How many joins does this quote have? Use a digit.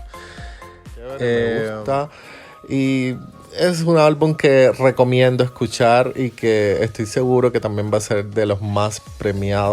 1